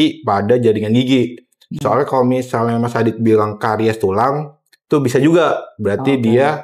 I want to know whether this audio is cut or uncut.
uncut